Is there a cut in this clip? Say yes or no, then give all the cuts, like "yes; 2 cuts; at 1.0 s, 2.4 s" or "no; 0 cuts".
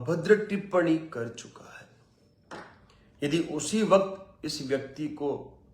no; 0 cuts